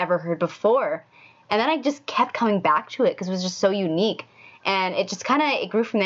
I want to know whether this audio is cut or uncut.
uncut